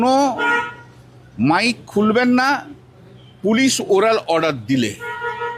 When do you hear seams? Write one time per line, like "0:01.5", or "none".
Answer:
none